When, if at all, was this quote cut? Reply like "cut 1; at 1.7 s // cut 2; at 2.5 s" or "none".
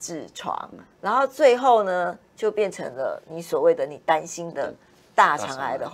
none